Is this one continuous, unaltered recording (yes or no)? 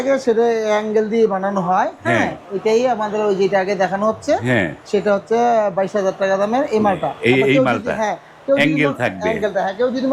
yes